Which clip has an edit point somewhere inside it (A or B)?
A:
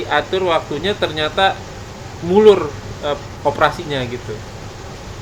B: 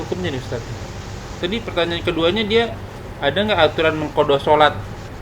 B